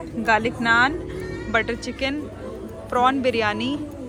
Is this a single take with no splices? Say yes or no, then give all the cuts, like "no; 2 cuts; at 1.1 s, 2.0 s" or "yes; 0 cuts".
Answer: yes; 0 cuts